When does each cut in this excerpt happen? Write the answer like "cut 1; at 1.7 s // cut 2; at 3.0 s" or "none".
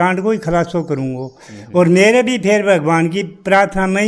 none